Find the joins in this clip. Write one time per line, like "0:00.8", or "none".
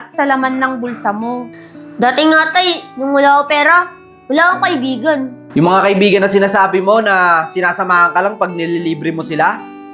0:01.5
0:05.4